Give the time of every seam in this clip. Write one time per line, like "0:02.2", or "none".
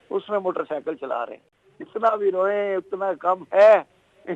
0:01.5